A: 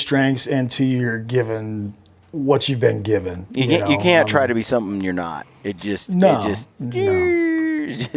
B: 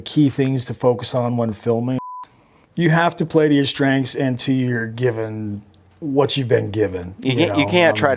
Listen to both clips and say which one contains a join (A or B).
B